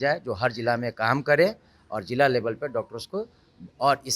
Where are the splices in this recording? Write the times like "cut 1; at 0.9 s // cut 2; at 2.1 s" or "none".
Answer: none